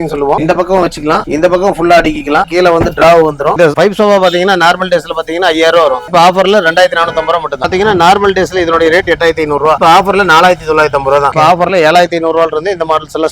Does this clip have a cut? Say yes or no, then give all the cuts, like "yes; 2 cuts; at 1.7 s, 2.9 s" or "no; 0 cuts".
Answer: yes; 4 cuts; at 2.5 s, 3.6 s, 7.7 s, 11.3 s